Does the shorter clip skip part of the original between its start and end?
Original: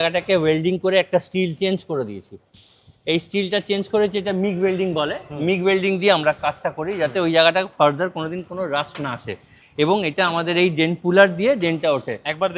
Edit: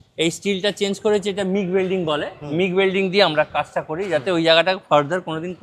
no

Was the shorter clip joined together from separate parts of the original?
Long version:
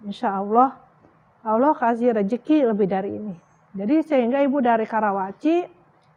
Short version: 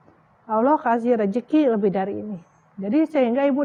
no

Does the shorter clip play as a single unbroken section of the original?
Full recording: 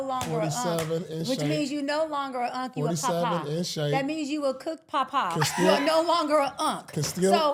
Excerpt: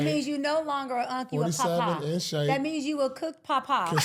yes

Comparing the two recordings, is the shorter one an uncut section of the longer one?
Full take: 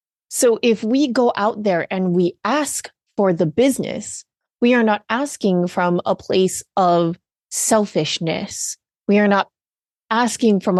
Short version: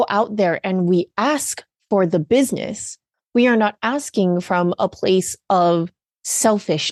yes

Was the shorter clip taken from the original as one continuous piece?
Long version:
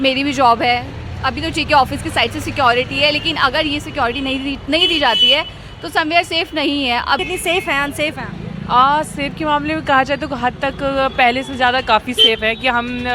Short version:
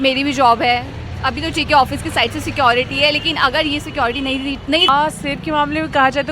no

